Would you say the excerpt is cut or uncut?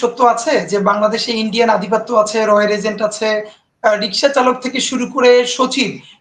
cut